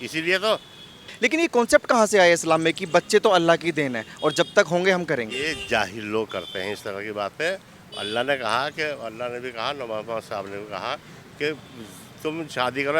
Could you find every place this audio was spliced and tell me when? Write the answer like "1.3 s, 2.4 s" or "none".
1.1 s